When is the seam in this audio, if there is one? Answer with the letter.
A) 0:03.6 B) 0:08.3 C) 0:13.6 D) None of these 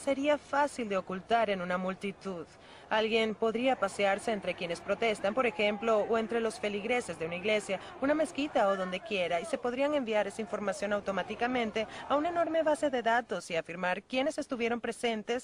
A